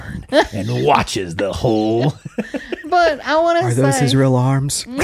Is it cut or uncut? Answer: uncut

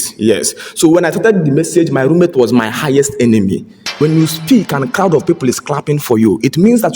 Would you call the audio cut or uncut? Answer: cut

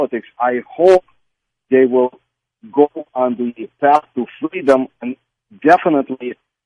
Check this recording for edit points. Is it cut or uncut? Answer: uncut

